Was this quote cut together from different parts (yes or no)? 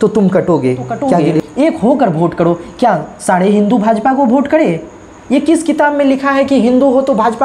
yes